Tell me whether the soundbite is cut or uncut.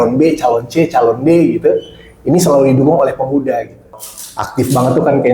cut